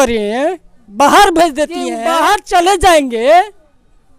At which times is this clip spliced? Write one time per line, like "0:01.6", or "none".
0:02.0